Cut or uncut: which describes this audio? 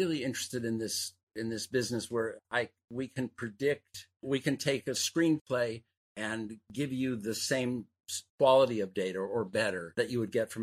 cut